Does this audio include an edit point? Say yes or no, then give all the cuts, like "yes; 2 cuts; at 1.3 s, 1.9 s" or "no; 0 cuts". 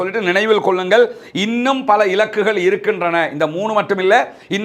no; 0 cuts